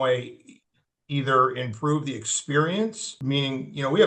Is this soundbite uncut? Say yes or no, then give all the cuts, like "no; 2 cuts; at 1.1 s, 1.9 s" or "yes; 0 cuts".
no; 1 cut; at 3.1 s